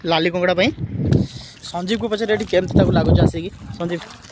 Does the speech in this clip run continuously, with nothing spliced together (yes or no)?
no